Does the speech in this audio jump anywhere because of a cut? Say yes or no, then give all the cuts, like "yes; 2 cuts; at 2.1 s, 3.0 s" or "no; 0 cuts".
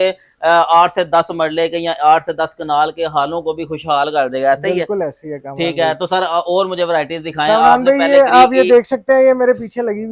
no; 0 cuts